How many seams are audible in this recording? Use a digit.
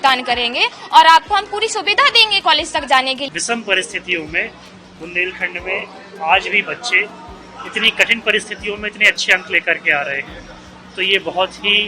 1